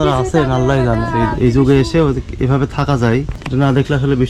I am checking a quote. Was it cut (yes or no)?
yes